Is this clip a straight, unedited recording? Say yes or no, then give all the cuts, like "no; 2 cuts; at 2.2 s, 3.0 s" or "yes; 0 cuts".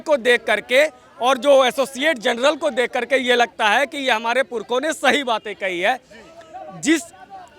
yes; 0 cuts